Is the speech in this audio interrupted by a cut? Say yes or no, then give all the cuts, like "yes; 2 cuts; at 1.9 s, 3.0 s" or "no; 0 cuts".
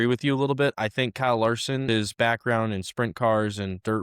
yes; 1 cut; at 1.8 s